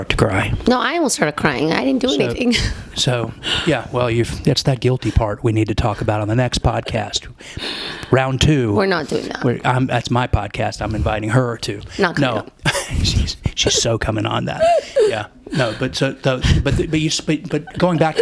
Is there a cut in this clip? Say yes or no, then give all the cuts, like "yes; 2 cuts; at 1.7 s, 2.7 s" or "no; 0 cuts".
no; 0 cuts